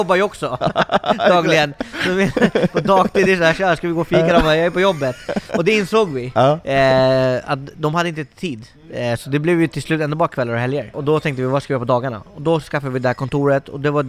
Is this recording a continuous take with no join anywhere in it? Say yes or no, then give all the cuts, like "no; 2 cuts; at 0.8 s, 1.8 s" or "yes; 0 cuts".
yes; 0 cuts